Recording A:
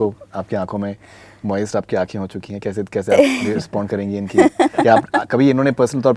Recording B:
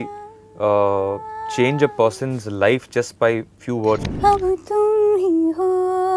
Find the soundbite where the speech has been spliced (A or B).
B